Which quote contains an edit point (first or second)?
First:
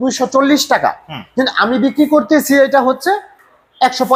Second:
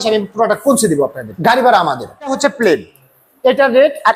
second